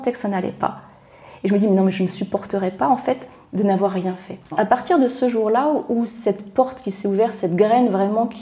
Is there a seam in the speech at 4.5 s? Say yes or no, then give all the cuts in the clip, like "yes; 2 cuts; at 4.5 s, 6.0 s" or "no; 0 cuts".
yes; 1 cut; at 4.5 s